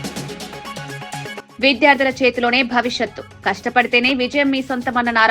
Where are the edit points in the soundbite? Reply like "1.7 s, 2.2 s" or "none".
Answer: 1.3 s